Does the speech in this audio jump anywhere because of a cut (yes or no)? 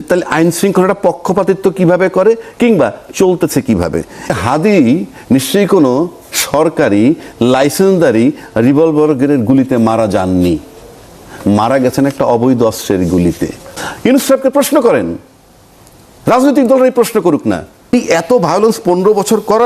yes